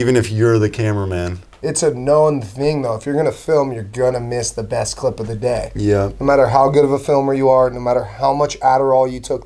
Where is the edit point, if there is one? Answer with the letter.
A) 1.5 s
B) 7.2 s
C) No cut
A